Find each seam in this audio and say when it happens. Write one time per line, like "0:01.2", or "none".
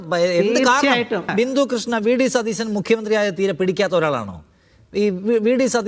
0:01.3